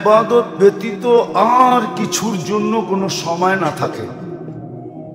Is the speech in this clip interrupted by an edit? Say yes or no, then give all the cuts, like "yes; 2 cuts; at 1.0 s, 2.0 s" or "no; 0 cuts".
no; 0 cuts